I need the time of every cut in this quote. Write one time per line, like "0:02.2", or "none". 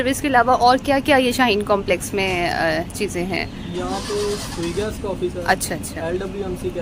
none